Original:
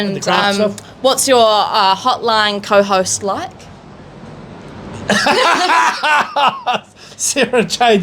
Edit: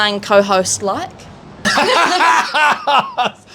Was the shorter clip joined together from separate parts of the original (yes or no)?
yes